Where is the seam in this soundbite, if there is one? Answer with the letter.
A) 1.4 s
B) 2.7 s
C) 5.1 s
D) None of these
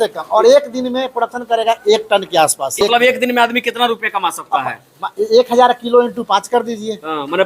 B